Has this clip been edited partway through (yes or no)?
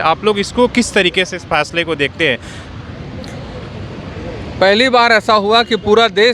no